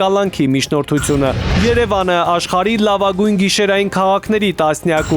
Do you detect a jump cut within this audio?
yes; 1 cut; at 1.5 s

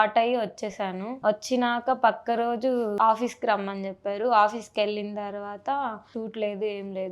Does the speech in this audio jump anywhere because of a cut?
yes; 3 cuts; at 1.1 s, 2.9 s, 6.1 s

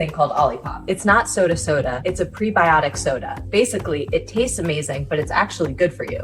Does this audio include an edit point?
no; 0 cuts

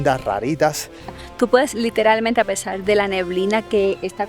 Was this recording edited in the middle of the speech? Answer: yes; 1 cut; at 1.2 s

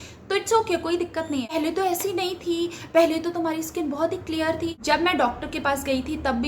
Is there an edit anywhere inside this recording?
yes; 2 cuts; at 1.5 s, 4.8 s

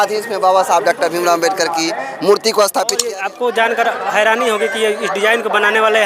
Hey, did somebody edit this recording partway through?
yes; 1 cut; at 3.0 s

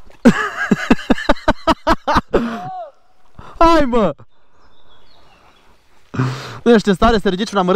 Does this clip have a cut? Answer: no; 0 cuts

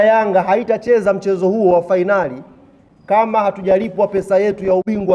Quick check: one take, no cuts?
yes; 0 cuts

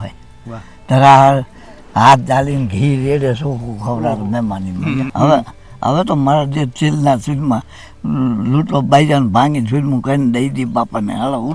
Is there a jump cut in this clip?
yes; 1 cut; at 5.0 s

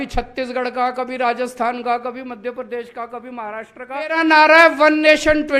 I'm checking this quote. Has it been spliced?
yes; 1 cut; at 4.2 s

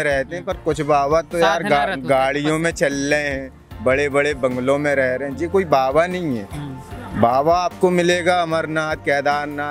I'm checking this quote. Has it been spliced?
no; 0 cuts

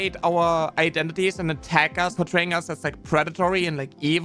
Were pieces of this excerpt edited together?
yes; 1 cut; at 2.1 s

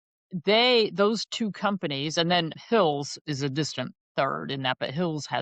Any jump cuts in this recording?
yes; 1 cut; at 2.6 s

